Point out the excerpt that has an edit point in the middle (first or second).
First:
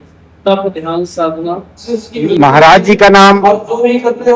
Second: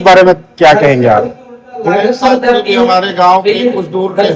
first